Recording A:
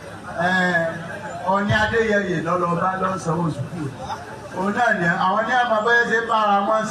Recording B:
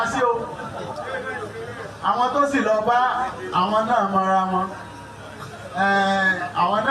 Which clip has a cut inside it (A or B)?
A